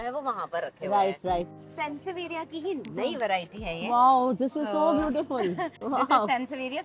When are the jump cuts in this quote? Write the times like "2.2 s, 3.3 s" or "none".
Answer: 1.5 s